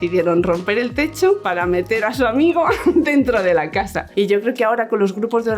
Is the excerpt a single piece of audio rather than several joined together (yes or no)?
no